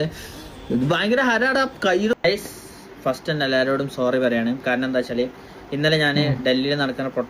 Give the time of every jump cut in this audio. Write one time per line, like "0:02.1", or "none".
0:02.1